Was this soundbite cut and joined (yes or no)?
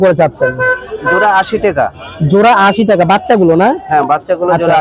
no